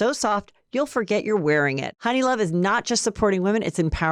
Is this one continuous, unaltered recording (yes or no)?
no